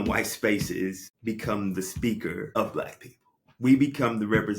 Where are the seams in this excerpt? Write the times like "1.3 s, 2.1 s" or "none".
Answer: 1.1 s, 2.5 s